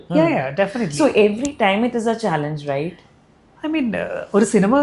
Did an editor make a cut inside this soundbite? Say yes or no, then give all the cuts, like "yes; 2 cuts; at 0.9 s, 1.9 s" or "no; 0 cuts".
no; 0 cuts